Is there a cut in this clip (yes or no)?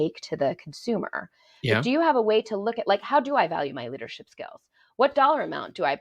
no